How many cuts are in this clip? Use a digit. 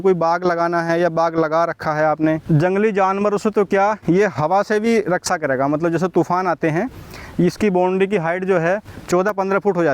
2